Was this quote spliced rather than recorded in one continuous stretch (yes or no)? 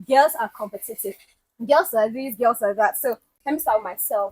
yes